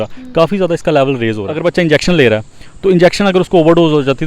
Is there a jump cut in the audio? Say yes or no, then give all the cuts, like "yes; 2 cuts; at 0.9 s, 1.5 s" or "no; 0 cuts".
yes; 1 cut; at 1.5 s